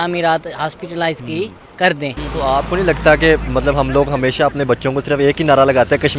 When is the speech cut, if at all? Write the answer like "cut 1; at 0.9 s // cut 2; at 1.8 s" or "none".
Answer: cut 1; at 2.2 s